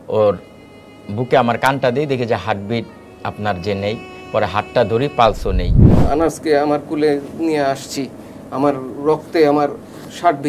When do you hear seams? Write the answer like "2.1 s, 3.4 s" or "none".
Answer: 5.9 s